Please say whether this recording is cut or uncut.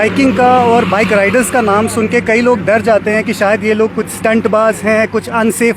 uncut